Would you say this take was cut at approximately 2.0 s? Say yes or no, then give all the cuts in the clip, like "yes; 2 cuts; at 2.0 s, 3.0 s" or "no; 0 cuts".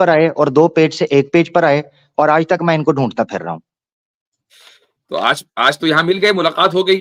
no; 0 cuts